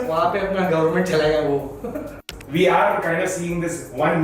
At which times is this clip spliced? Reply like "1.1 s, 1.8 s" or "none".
2.3 s